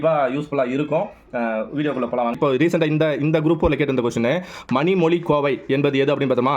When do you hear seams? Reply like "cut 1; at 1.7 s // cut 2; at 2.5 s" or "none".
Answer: cut 1; at 2.3 s